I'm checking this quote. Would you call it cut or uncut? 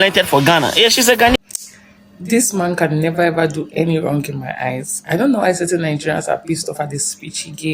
cut